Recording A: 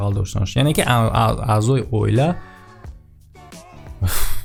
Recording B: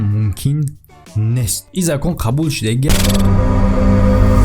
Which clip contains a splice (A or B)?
B